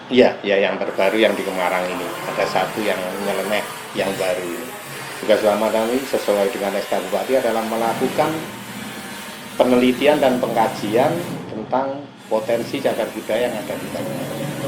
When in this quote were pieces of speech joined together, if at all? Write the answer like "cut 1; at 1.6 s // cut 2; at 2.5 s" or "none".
cut 1; at 5.2 s